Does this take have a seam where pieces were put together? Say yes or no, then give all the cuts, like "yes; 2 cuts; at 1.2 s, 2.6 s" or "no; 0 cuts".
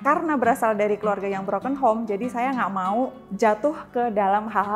yes; 1 cut; at 3.2 s